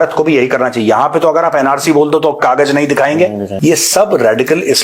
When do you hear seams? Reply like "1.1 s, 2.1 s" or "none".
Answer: 3.5 s